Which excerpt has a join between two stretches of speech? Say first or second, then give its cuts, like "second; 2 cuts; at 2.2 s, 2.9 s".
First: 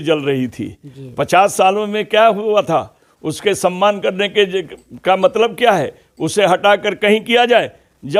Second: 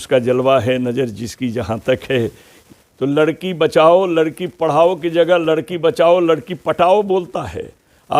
second; 1 cut; at 2.6 s